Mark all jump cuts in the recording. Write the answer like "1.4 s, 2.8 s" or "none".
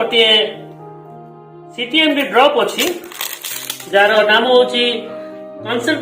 none